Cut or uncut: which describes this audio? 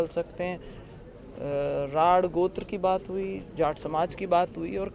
uncut